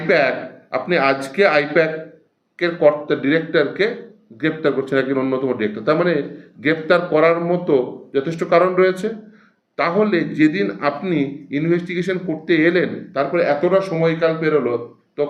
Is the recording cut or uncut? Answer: uncut